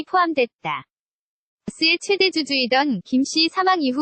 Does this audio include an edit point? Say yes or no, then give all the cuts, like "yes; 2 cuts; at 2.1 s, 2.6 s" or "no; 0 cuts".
yes; 1 cut; at 1.7 s